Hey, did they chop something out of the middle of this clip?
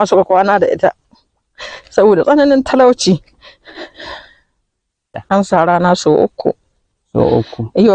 yes; 1 cut; at 5.2 s

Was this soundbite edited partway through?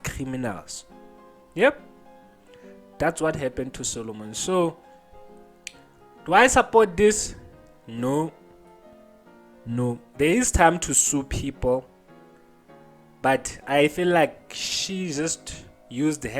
no; 0 cuts

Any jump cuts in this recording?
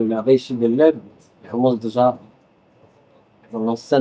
no; 0 cuts

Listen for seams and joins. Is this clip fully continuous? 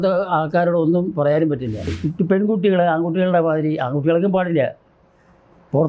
no; 1 cut; at 2.0 s

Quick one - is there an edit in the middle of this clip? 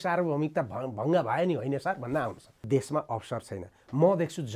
yes; 1 cut; at 2.6 s

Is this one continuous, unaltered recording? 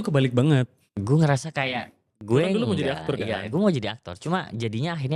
no; 1 cut; at 2.0 s

